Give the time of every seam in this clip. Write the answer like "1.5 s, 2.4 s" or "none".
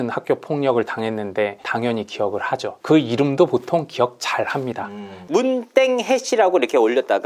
5.2 s